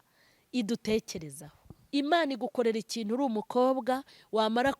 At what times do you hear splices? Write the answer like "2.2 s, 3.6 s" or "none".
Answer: 1.7 s